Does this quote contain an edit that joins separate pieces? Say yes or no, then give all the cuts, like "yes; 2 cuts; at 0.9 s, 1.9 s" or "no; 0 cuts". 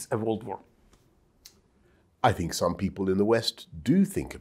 no; 0 cuts